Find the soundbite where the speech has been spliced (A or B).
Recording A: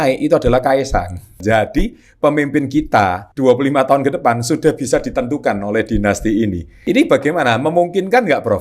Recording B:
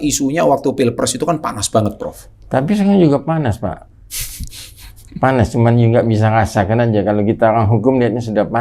A